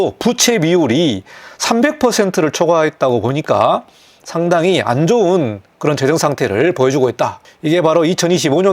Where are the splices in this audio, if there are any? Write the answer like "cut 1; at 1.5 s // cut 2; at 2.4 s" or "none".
none